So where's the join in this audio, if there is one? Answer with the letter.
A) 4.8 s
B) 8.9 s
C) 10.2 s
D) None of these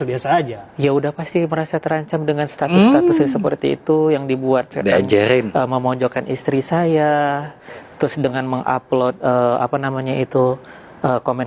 D